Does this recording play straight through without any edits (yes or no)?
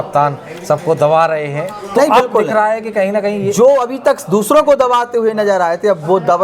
yes